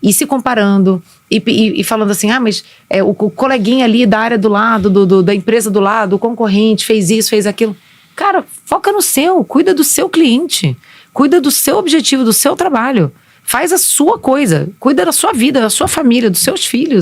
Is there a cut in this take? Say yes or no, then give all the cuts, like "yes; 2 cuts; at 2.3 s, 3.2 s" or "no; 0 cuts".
no; 0 cuts